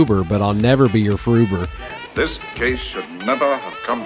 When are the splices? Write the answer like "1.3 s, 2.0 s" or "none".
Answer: 1.5 s